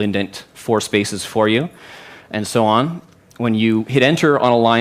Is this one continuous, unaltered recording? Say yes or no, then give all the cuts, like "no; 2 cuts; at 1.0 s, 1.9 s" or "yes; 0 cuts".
no; 1 cut; at 3.5 s